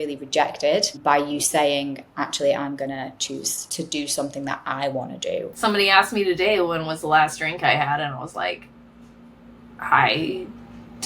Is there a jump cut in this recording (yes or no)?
yes